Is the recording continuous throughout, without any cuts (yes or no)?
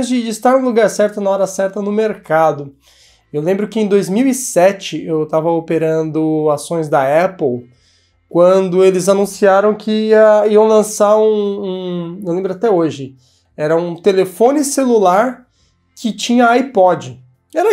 yes